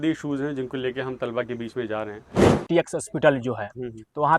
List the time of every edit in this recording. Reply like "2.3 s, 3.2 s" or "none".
2.4 s